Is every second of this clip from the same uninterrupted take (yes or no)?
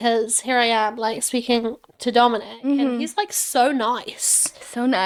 yes